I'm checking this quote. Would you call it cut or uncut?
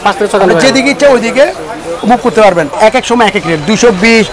cut